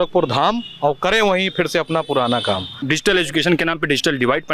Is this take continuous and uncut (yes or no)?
no